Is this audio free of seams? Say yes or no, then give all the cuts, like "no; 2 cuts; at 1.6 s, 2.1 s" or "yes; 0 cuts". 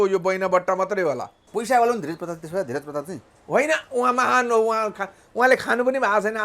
no; 1 cut; at 1.4 s